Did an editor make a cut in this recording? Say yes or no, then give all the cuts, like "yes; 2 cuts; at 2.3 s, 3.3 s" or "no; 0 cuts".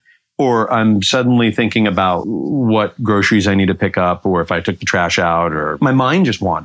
yes; 2 cuts; at 2.2 s, 5.7 s